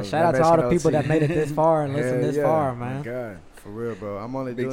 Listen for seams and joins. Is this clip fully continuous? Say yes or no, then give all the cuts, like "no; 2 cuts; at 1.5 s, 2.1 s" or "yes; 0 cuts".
yes; 0 cuts